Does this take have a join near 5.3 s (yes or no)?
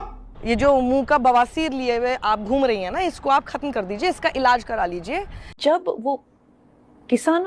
yes